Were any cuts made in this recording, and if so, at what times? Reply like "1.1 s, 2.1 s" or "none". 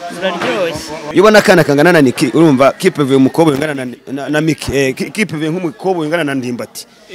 1.0 s

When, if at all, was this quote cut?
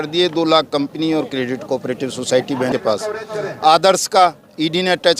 2.7 s

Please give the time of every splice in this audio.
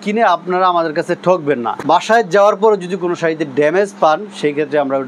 1.7 s

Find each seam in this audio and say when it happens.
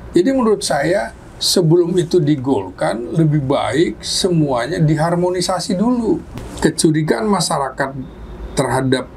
6.3 s

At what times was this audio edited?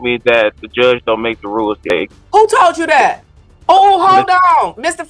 1.9 s

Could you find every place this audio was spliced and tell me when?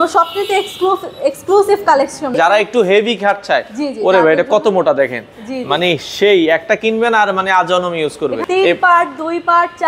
2.3 s, 8.4 s

